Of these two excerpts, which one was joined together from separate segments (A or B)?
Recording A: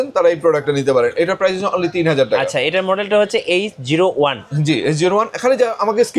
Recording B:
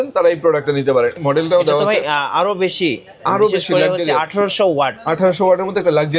B